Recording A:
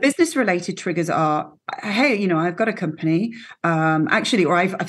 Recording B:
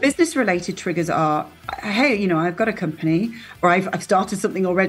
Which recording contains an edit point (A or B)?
B